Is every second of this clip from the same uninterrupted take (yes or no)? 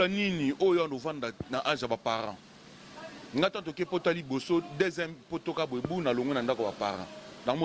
yes